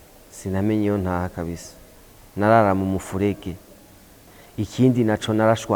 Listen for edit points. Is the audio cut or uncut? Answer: cut